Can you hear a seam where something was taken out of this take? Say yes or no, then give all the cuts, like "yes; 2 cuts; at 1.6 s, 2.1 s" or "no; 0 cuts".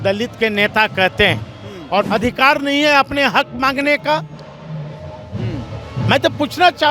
yes; 1 cut; at 2.1 s